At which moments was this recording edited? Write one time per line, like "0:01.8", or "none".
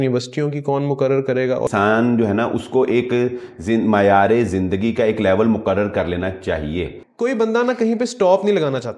0:01.7
0:07.0